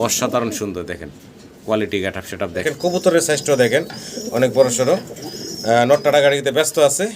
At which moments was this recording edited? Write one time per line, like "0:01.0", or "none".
0:02.6